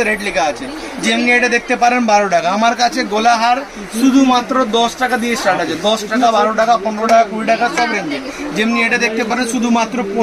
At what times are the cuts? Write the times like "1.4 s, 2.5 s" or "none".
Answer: none